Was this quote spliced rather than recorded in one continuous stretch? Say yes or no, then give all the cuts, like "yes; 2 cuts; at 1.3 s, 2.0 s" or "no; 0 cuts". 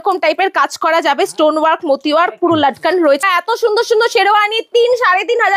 yes; 1 cut; at 3.2 s